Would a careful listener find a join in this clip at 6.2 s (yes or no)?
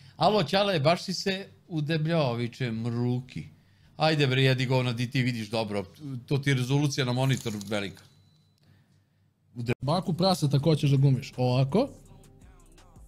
no